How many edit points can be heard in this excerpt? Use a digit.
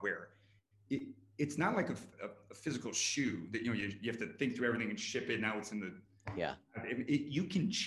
1